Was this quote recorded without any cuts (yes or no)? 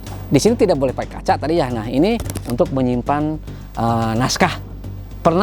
no